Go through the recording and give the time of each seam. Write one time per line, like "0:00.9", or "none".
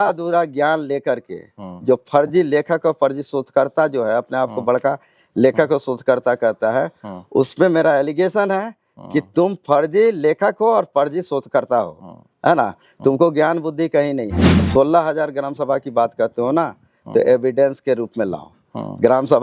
0:14.7